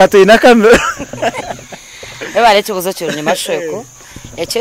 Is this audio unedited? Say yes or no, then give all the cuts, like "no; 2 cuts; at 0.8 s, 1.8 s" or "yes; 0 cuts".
yes; 0 cuts